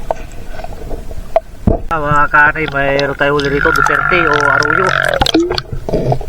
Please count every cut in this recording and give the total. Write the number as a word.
one